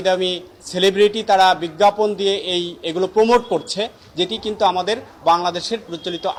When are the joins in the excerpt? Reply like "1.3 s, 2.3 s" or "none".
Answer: none